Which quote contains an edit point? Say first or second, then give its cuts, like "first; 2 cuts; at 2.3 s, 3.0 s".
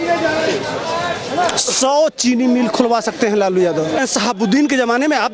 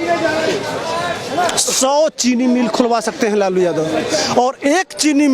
first; 1 cut; at 4.0 s